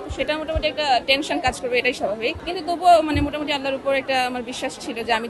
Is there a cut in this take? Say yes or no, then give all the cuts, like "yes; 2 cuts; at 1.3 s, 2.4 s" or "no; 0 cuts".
yes; 1 cut; at 2.4 s